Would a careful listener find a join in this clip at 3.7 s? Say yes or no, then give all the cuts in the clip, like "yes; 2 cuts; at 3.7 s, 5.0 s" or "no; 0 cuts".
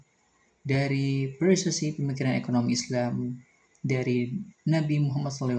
no; 0 cuts